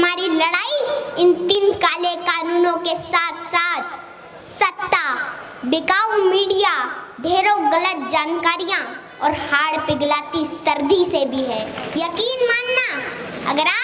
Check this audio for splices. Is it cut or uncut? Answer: cut